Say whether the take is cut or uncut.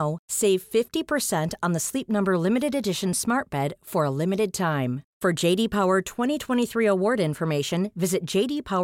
uncut